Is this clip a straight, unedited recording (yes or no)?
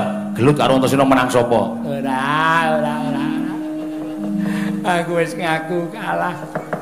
yes